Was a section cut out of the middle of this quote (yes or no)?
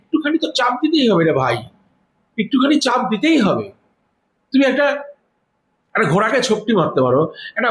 no